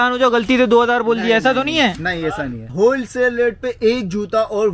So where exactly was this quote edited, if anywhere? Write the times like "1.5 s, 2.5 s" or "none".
2.7 s